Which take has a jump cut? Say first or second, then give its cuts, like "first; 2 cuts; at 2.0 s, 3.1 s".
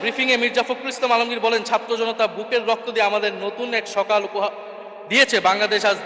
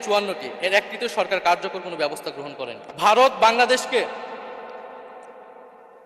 second; 1 cut; at 2.8 s